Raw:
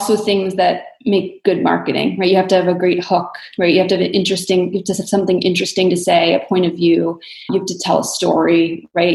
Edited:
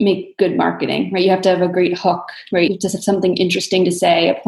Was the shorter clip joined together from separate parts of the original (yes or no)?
yes